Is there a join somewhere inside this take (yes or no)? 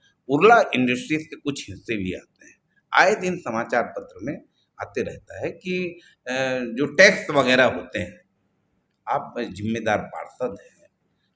no